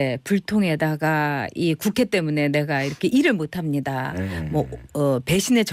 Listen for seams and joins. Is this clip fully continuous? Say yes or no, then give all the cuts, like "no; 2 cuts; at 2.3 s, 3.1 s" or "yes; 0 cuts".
yes; 0 cuts